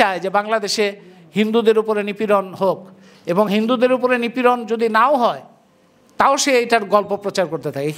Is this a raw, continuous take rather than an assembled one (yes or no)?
yes